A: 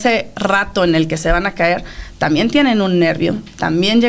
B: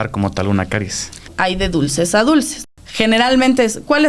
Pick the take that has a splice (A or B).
B